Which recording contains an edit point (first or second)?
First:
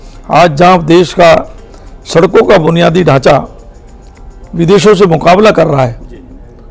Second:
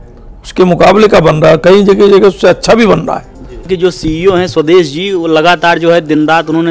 second